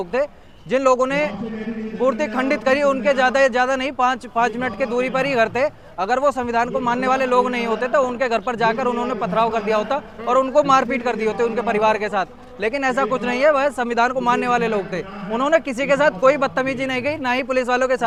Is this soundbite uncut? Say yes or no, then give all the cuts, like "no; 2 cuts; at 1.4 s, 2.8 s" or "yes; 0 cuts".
yes; 0 cuts